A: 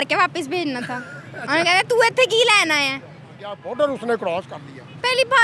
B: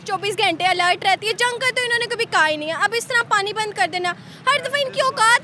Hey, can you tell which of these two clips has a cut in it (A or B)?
A